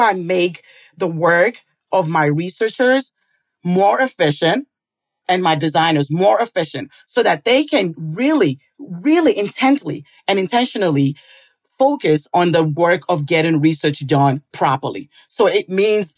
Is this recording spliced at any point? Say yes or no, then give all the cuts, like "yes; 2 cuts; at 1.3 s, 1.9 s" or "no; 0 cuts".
no; 0 cuts